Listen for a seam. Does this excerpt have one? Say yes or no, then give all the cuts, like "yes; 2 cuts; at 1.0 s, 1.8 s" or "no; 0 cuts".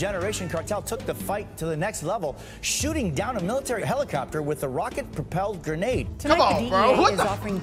no; 0 cuts